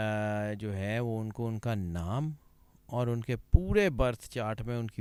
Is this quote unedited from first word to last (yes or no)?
yes